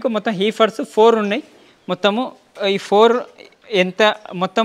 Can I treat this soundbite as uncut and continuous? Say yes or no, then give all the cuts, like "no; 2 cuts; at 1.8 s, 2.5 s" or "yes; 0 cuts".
yes; 0 cuts